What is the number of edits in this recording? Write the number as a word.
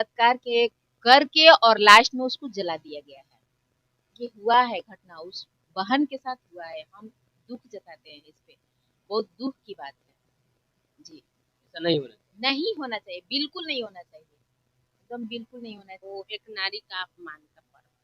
one